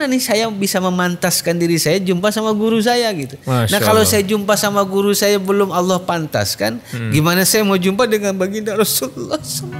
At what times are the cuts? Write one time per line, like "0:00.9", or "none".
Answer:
none